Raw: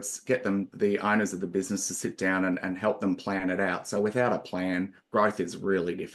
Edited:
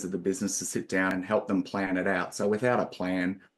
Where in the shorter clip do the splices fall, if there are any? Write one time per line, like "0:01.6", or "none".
0:01.1